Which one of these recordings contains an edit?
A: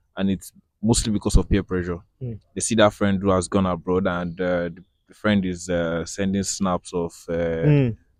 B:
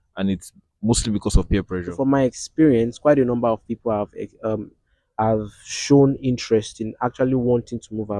B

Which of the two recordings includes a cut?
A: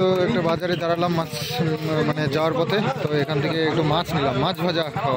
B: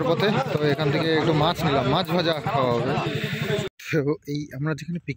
B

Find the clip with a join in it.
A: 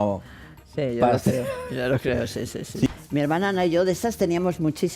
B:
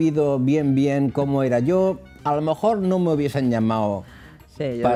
A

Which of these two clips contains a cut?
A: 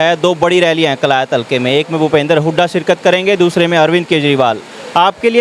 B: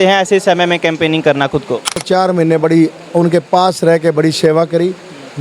B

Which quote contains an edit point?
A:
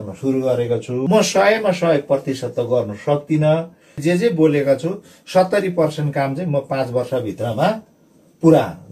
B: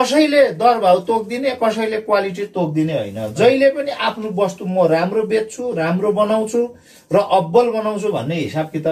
A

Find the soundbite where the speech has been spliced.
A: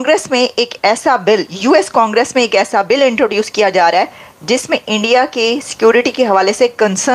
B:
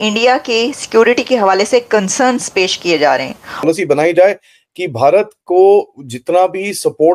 B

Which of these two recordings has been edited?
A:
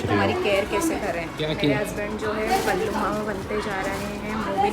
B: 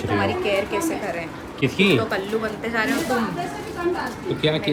A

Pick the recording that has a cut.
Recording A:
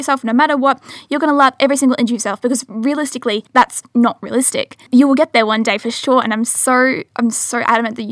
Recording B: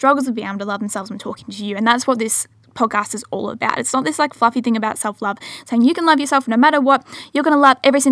A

